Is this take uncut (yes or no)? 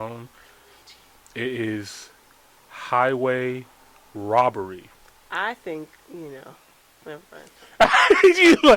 no